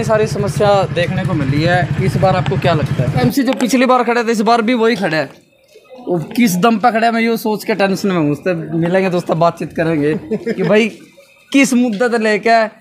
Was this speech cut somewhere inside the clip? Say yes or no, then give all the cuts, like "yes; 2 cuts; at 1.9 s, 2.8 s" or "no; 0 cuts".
yes; 1 cut; at 3.2 s